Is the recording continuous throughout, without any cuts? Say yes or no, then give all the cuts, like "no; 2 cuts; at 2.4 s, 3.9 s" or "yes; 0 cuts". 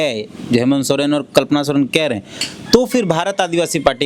yes; 0 cuts